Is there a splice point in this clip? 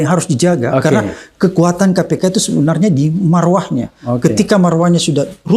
no; 0 cuts

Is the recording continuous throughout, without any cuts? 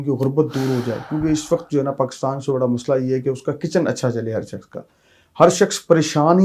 yes; 0 cuts

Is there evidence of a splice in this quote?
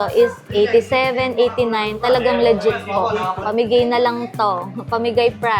yes; 1 cut; at 3.4 s

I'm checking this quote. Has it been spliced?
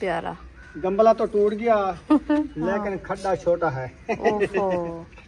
no; 0 cuts

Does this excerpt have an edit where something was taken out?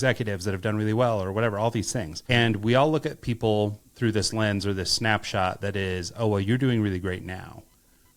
no; 0 cuts

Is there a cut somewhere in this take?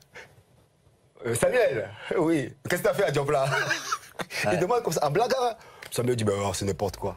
no; 0 cuts

